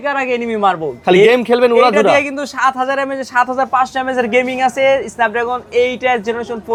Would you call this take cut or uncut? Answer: uncut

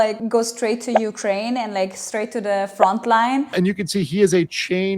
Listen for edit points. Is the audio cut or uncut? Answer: cut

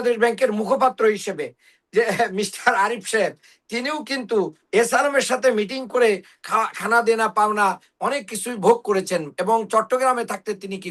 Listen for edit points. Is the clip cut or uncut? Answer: uncut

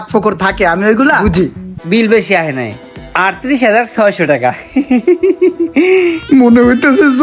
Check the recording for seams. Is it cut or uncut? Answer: cut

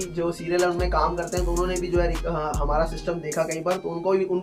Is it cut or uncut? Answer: uncut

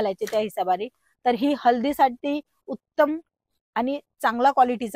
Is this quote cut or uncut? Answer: uncut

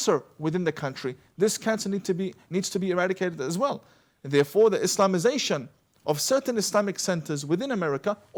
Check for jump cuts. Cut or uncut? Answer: uncut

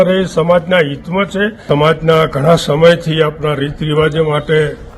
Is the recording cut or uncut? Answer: cut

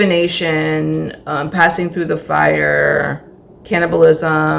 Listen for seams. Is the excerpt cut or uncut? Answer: uncut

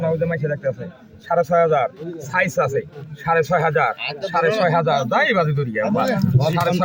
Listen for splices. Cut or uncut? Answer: uncut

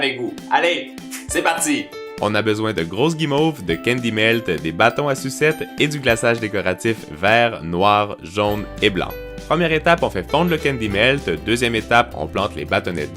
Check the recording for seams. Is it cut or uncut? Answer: cut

